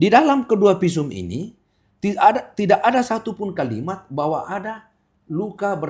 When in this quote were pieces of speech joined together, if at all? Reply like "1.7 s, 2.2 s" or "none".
none

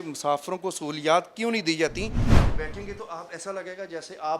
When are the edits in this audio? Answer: 2.6 s

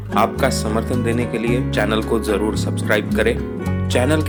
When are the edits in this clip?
none

